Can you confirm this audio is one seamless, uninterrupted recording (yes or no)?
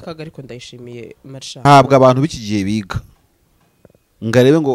no